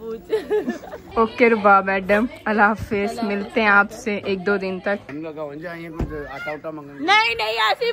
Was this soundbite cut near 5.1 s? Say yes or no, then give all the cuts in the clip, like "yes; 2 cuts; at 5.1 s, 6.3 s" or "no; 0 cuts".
yes; 2 cuts; at 0.9 s, 5.1 s